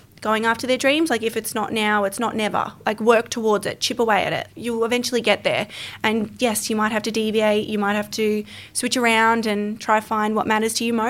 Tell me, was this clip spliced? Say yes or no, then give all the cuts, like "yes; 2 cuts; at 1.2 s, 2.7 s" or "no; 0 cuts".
no; 0 cuts